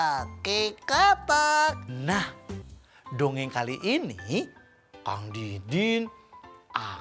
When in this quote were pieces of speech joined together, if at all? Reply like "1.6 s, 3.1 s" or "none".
1.9 s